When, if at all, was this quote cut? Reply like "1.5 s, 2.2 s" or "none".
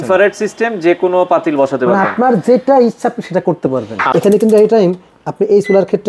4.0 s